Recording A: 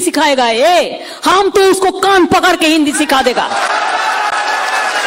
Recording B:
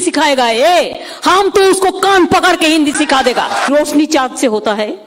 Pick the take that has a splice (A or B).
B